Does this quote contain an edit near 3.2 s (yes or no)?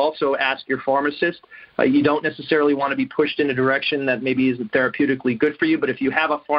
no